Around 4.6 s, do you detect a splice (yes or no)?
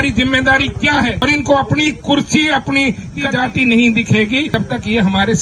yes